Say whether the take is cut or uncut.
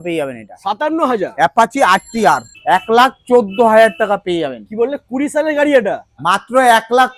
cut